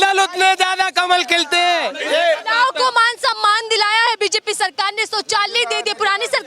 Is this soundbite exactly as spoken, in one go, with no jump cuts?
no; 1 cut; at 1.9 s

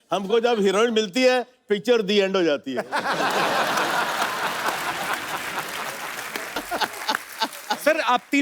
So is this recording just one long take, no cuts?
no; 1 cut; at 6.6 s

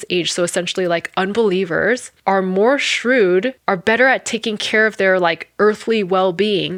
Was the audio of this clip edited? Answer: no; 0 cuts

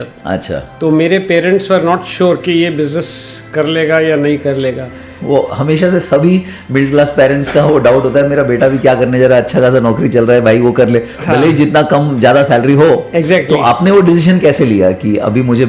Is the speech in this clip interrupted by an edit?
no; 0 cuts

